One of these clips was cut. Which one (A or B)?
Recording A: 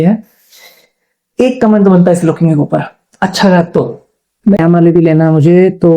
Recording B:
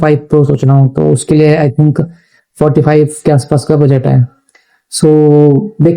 A